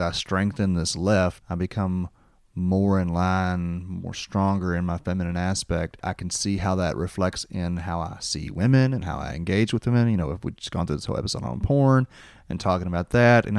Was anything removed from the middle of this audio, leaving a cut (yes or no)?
yes